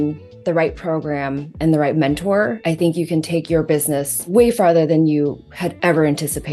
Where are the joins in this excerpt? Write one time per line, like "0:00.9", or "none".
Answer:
0:02.6
0:04.3